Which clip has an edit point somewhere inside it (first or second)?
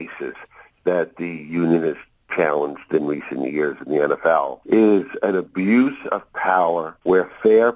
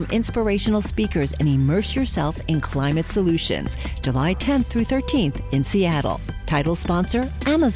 first